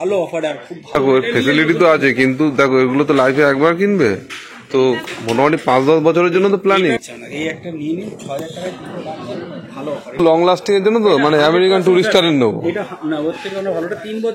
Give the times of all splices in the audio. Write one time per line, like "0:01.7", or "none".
0:00.9
0:07.0
0:10.2